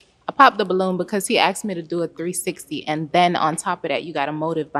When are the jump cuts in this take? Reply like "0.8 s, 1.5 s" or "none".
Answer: none